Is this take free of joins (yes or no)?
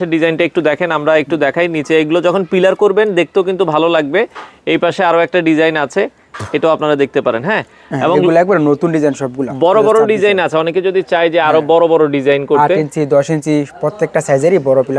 yes